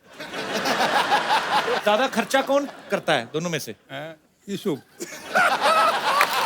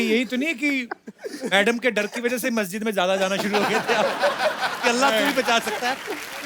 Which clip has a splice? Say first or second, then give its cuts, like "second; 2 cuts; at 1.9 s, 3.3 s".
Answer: first; 1 cut; at 1.8 s